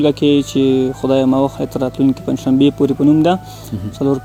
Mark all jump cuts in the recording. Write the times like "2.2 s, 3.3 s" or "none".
none